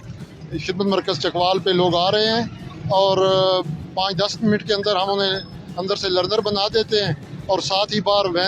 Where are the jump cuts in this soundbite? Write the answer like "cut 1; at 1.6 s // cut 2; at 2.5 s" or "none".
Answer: none